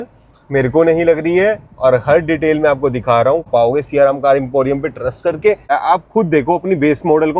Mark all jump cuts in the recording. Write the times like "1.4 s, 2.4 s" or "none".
3.5 s, 5.6 s